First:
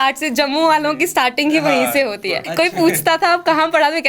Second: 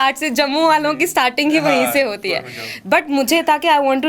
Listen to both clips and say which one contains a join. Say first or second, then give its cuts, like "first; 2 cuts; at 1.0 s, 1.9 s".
first; 1 cut; at 2.4 s